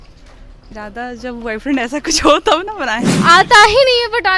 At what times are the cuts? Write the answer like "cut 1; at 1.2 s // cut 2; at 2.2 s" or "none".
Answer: cut 1; at 3.1 s